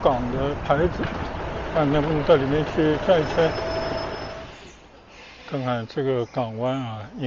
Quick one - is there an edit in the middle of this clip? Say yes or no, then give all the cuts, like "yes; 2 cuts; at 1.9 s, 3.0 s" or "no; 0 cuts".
yes; 1 cut; at 4.3 s